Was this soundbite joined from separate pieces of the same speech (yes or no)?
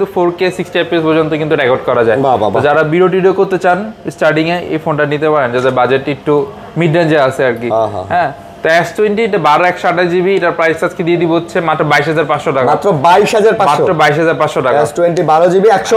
no